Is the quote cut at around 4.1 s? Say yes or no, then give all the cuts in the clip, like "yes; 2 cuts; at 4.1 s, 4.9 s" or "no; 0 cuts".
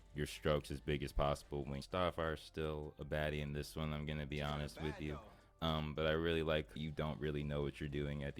no; 2 cuts; at 1.8 s, 6.7 s